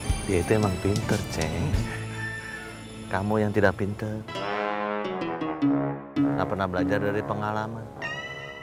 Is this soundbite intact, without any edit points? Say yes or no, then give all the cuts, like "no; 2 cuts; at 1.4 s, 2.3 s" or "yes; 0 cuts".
yes; 0 cuts